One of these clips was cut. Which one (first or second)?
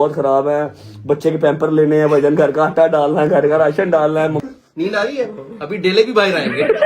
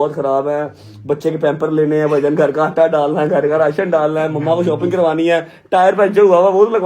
first